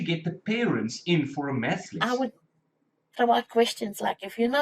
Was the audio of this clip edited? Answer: yes; 1 cut; at 1.9 s

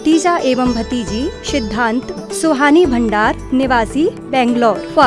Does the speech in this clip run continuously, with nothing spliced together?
yes; 0 cuts

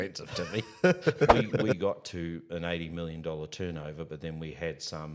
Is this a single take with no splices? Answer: no; 1 cut; at 1.8 s

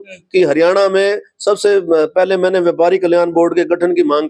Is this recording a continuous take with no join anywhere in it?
yes; 0 cuts

